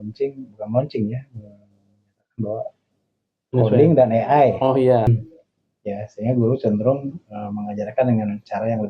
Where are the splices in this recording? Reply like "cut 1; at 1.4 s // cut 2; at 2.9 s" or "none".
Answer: cut 1; at 5.1 s